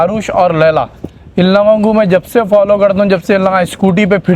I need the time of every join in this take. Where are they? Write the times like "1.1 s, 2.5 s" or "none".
none